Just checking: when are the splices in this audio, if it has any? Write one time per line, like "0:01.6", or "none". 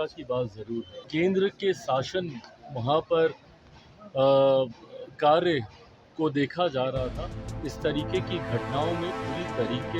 0:01.0